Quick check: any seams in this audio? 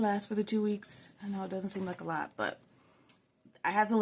no; 0 cuts

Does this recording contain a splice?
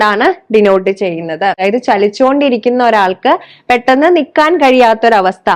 yes; 1 cut; at 1.6 s

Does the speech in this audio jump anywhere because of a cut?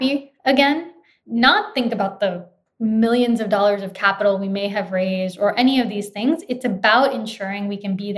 yes; 1 cut; at 1.1 s

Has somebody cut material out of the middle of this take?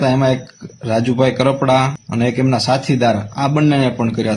yes; 1 cut; at 2.0 s

